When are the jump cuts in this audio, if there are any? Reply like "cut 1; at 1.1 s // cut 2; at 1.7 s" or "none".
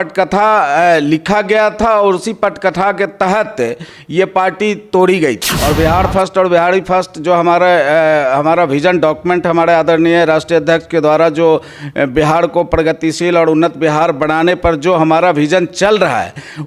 cut 1; at 5.5 s